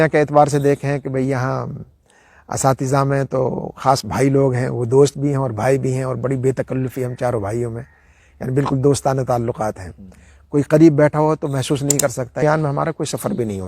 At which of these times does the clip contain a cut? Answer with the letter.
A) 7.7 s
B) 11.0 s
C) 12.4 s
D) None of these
C